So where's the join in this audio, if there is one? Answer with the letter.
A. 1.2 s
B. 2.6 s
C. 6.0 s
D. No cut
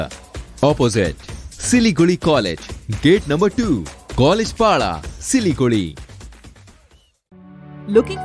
D